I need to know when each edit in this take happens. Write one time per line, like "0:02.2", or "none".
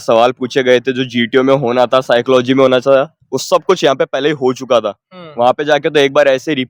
none